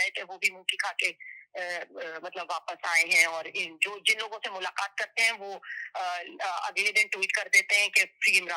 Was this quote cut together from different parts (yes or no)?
no